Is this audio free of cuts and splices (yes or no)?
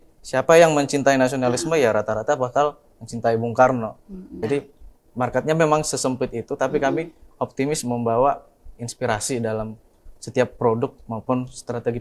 no